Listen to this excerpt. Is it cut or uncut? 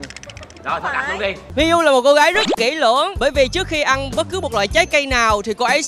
cut